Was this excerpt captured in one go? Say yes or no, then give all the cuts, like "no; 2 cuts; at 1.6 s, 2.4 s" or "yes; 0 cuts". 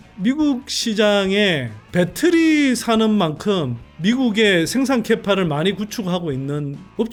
yes; 0 cuts